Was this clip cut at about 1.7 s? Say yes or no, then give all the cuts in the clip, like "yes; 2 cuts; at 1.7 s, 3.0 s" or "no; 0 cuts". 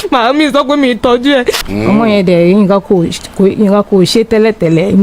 yes; 1 cut; at 1.7 s